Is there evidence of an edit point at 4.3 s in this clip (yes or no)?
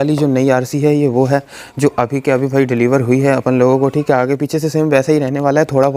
no